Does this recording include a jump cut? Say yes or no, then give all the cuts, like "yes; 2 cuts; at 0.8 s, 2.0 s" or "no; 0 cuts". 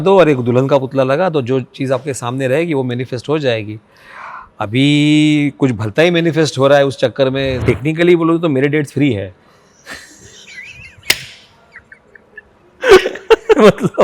yes; 1 cut; at 7.5 s